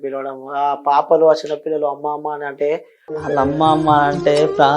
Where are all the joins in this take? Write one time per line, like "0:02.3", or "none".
0:03.1